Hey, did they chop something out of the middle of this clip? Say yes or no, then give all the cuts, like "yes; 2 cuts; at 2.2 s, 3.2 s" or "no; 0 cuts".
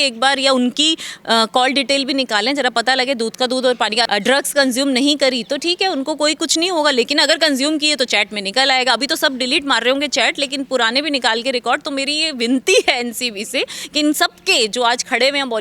yes; 1 cut; at 4.1 s